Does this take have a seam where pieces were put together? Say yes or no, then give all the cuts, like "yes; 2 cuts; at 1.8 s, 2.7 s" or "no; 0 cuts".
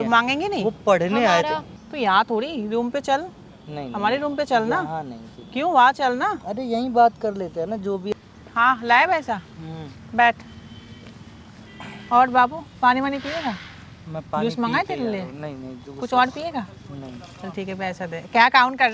yes; 2 cuts; at 1.8 s, 8.1 s